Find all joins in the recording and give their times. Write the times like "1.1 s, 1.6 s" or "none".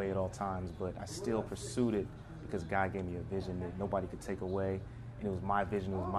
none